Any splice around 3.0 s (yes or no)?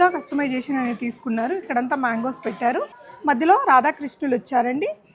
yes